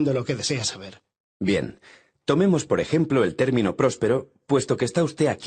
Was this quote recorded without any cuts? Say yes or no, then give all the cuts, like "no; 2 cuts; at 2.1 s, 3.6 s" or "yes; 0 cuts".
yes; 0 cuts